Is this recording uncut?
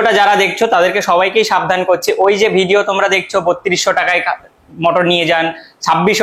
yes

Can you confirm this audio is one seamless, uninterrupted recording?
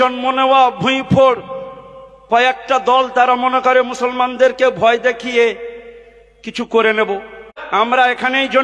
no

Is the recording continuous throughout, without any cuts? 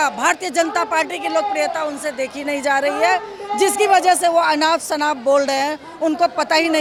yes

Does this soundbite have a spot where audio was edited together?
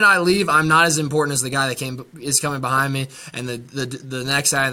no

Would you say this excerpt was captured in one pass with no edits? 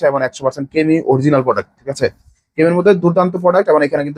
yes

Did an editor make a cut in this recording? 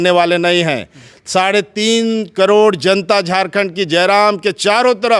no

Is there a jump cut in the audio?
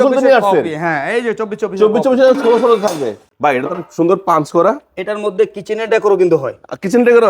yes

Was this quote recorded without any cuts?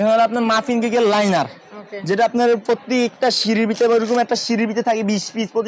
yes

